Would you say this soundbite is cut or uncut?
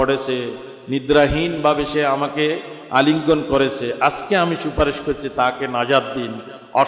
uncut